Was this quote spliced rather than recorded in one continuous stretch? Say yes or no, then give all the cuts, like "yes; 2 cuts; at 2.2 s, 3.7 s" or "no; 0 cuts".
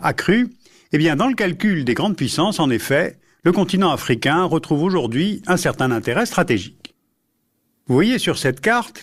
yes; 1 cut; at 3.1 s